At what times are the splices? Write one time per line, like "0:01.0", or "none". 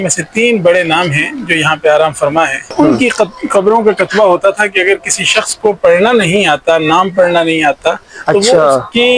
0:02.7